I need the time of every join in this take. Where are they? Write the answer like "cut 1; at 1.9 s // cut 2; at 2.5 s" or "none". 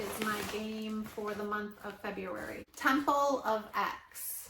cut 1; at 2.7 s